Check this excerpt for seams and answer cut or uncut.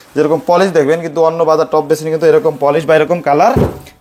uncut